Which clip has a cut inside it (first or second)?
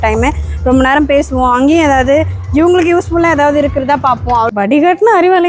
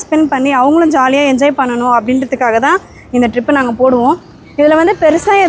first